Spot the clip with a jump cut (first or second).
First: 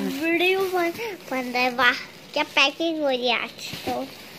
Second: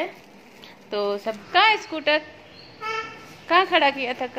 second